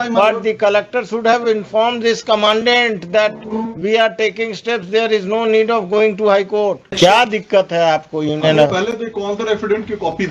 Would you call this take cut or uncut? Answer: cut